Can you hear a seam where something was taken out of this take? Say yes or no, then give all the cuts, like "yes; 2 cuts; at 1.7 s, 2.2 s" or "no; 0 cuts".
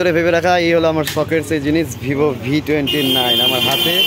no; 0 cuts